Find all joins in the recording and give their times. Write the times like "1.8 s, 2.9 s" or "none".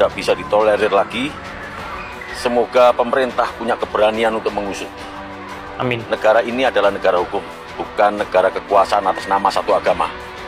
none